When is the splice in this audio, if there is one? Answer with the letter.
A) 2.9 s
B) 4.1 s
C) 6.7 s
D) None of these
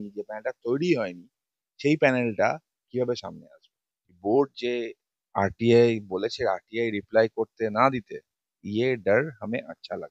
B